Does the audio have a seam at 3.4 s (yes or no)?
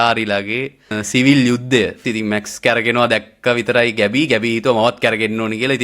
no